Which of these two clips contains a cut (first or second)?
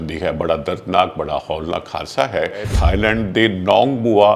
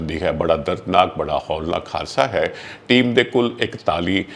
first